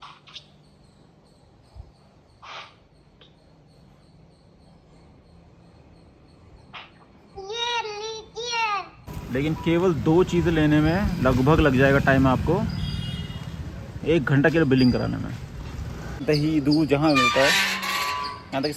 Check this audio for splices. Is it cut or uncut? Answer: cut